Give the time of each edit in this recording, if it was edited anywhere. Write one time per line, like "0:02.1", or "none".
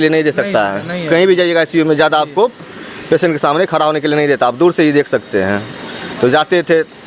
none